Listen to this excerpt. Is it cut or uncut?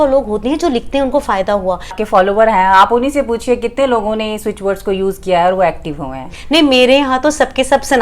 cut